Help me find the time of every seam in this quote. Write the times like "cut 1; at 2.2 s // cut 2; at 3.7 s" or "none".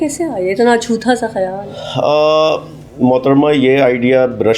none